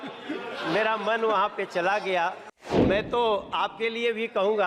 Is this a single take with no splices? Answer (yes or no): no